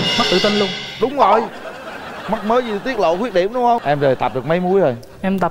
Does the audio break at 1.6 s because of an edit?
no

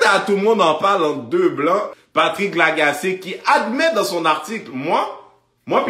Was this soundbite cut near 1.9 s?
yes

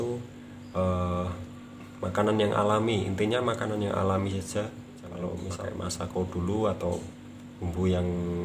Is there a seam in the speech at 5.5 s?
yes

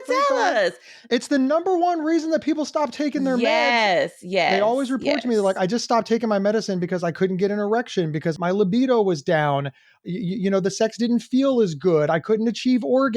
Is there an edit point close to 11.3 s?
no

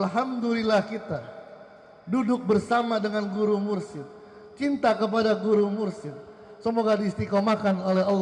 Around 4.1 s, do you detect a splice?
no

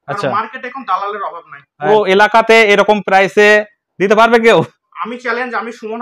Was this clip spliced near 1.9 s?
no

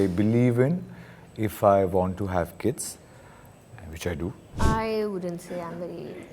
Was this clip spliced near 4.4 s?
yes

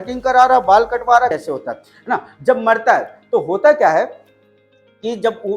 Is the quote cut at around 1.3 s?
yes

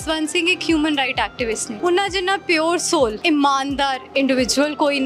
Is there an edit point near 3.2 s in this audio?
yes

